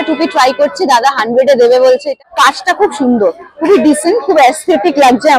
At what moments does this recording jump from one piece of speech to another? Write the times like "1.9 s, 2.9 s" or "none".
2.2 s